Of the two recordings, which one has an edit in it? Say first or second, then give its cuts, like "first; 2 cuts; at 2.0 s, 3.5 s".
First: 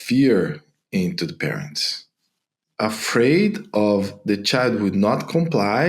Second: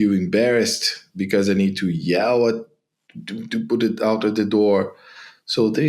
first; 1 cut; at 2.6 s